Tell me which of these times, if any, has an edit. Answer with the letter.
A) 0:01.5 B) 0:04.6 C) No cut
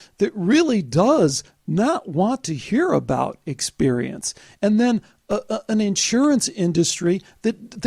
C